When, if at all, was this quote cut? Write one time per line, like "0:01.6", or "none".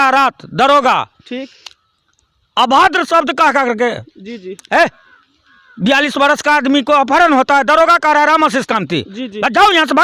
none